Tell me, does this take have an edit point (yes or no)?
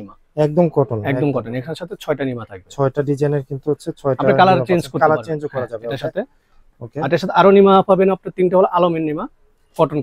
no